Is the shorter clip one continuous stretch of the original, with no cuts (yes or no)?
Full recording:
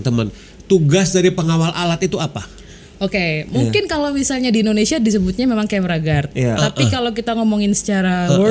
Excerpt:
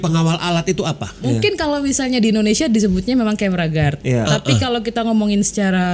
no